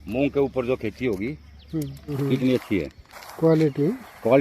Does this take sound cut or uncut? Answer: cut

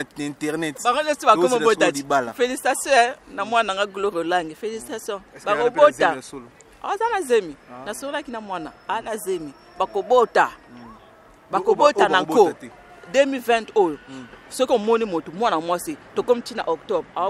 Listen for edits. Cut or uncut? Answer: uncut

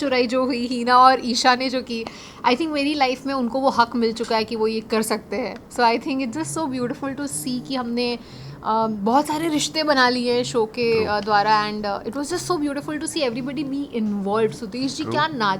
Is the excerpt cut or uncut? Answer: uncut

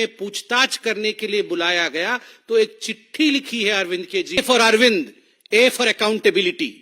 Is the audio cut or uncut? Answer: cut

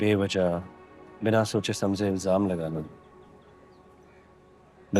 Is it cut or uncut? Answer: uncut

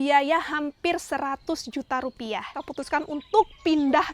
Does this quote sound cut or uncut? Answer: cut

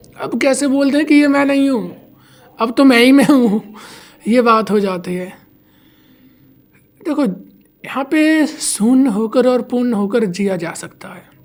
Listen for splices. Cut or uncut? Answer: uncut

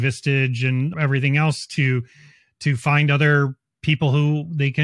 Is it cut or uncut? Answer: cut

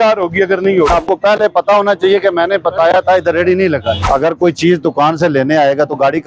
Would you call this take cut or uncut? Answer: cut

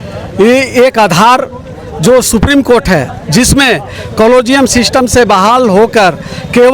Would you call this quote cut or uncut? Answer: uncut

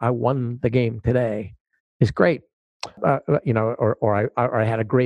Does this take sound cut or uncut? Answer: cut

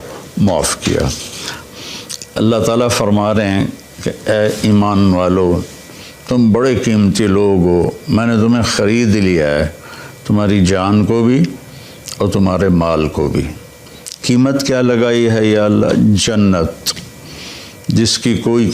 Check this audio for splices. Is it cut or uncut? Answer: cut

